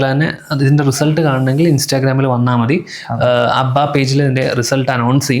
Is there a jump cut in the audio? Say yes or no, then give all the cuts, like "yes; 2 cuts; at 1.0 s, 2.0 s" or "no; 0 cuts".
no; 0 cuts